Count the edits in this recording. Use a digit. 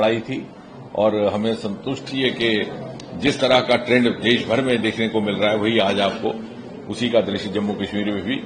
0